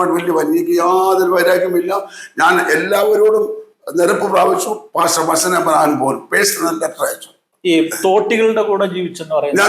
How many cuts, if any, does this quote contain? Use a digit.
1